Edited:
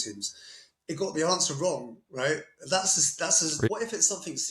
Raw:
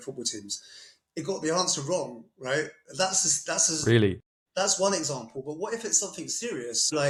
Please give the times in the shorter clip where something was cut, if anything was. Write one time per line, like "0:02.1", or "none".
0:03.5